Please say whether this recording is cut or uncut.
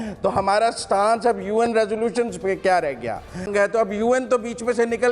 cut